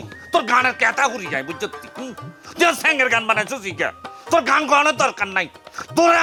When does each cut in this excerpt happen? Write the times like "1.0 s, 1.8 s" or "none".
none